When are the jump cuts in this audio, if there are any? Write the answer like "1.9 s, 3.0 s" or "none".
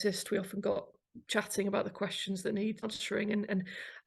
0.9 s, 2.8 s